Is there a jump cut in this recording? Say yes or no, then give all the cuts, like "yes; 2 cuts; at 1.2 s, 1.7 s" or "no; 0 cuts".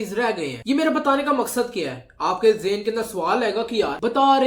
no; 0 cuts